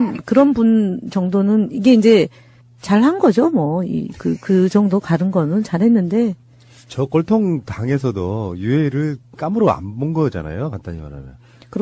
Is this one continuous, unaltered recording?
yes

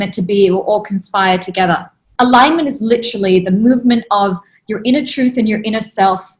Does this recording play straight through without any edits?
no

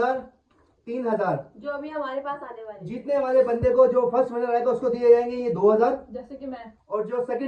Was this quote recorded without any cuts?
yes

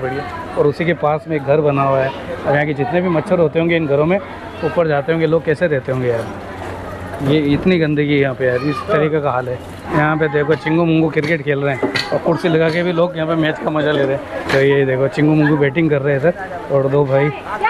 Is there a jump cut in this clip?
no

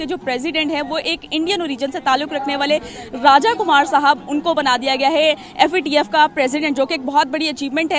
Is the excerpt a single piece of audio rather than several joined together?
yes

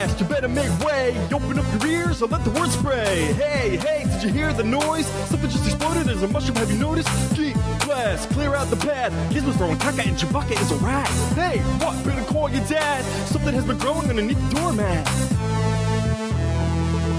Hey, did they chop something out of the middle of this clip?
no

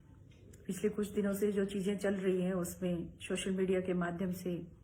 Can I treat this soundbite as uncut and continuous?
no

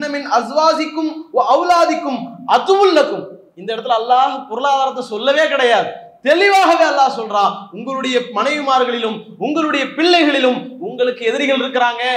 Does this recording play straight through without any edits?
yes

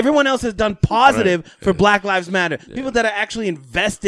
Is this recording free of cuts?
yes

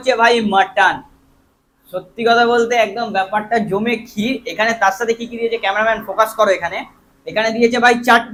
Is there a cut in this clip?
no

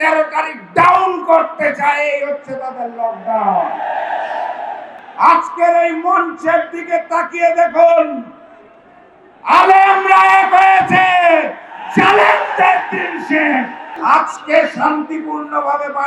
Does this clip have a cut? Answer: yes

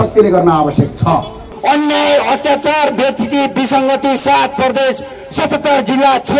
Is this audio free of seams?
no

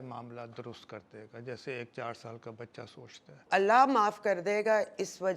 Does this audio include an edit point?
yes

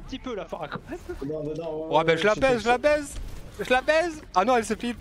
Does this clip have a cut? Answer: no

